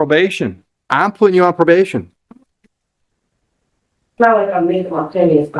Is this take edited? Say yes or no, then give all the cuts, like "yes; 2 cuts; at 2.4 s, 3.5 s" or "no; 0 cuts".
no; 0 cuts